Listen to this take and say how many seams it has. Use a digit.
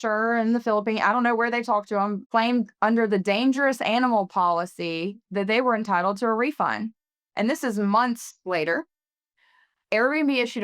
1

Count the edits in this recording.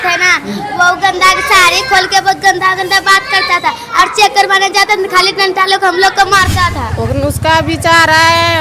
1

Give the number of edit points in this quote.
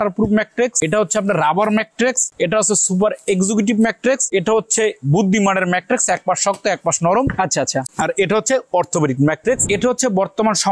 5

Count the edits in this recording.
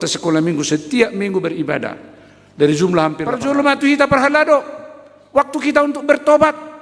1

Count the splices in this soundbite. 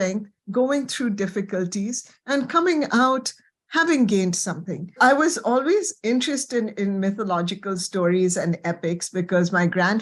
1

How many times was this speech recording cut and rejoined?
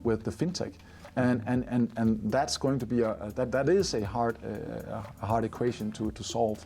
0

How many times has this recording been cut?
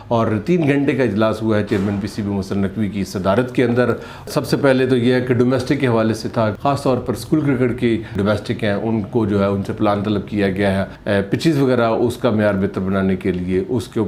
4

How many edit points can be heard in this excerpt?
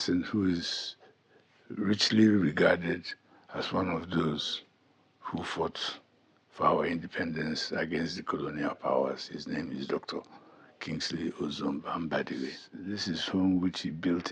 1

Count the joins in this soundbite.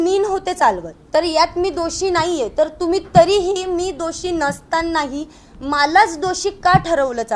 1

